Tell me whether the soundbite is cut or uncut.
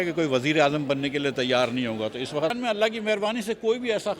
cut